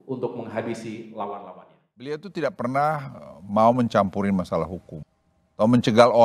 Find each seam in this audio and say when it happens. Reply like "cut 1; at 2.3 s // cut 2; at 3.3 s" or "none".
cut 1; at 2.2 s